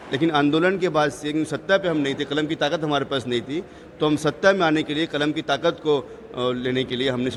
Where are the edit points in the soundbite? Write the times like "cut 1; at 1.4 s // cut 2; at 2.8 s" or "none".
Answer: none